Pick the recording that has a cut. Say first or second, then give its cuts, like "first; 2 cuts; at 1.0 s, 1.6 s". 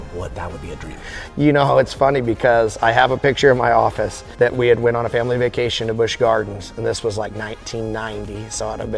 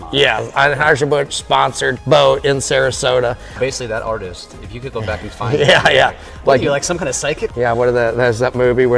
second; 2 cuts; at 3.6 s, 7.4 s